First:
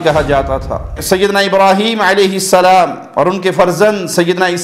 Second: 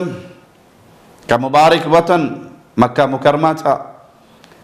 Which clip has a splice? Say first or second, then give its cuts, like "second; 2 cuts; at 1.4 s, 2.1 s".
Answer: first; 1 cut; at 0.9 s